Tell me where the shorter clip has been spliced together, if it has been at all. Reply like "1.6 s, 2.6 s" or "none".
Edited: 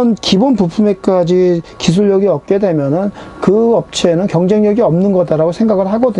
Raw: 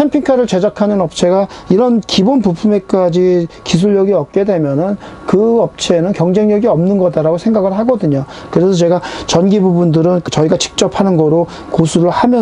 none